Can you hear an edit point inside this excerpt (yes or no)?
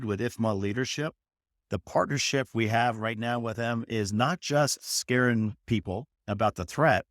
yes